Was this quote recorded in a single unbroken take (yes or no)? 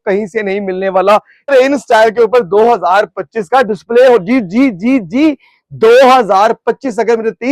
no